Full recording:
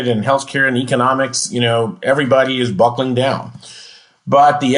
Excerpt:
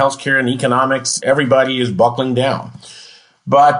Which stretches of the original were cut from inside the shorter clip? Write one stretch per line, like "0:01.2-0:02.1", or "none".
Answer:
0:01.4-0:01.9